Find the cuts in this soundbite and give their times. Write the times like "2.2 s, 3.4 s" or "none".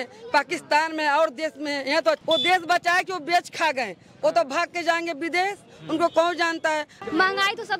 2.2 s, 7.0 s